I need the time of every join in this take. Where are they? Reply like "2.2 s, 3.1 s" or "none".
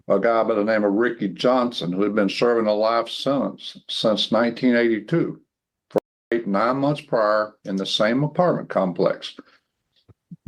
none

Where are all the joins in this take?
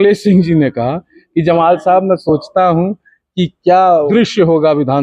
4.1 s

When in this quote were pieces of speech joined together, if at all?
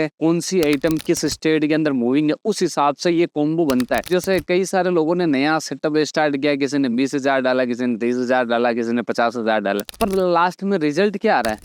none

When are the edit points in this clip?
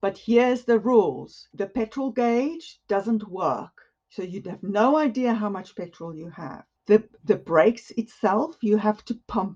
6.7 s

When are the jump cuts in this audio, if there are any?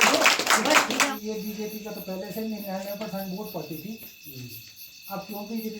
1.1 s

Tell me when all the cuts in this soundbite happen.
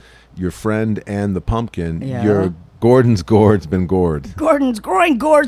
2.8 s

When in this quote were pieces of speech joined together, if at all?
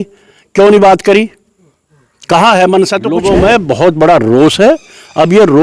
3.1 s

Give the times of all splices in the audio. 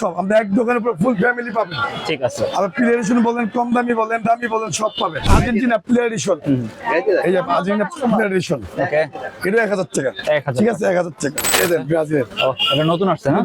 5.3 s, 11.5 s

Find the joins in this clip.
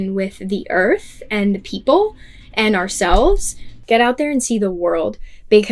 3.7 s

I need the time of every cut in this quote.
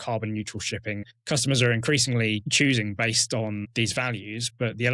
1.1 s, 2.5 s, 3.7 s

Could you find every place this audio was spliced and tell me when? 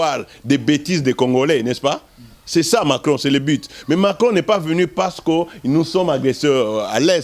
none

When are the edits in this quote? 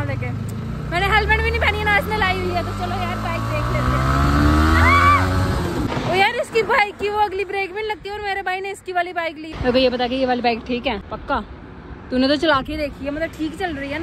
5.9 s, 9.5 s, 11.0 s

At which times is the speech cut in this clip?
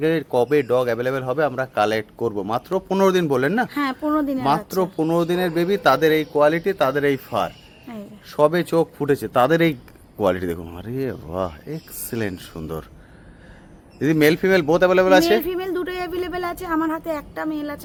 none

